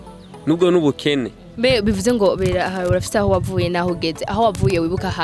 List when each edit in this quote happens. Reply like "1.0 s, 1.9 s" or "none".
1.4 s